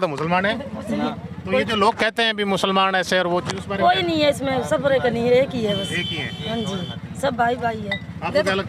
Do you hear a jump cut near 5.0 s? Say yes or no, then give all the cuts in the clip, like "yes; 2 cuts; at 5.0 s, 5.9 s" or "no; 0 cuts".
no; 1 cut; at 1.2 s